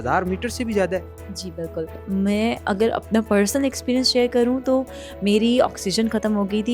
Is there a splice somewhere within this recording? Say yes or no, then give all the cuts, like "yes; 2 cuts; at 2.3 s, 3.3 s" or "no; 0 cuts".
yes; 1 cut; at 1.9 s